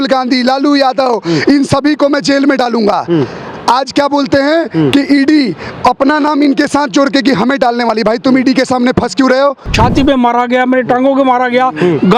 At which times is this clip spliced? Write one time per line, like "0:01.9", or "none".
0:09.7